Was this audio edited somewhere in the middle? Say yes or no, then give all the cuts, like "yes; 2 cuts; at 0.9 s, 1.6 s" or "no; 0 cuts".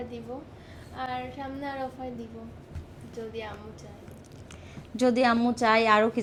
no; 0 cuts